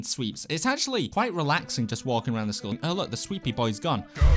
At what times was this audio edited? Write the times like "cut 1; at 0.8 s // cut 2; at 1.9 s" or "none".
cut 1; at 1.1 s // cut 2; at 2.8 s